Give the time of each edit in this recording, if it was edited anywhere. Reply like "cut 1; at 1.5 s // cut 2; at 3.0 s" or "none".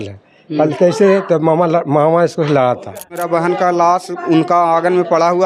cut 1; at 3.2 s